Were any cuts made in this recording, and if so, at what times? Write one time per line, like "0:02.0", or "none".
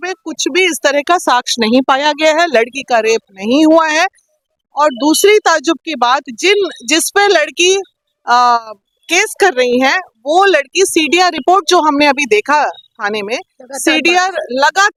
none

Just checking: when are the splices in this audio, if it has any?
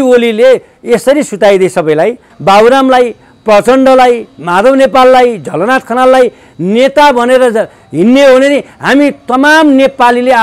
0:02.3

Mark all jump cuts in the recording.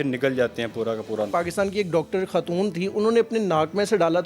0:01.3

